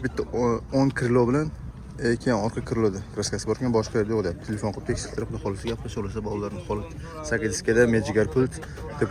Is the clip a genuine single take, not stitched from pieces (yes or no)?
yes